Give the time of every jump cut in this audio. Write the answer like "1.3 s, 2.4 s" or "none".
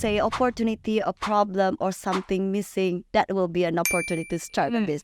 none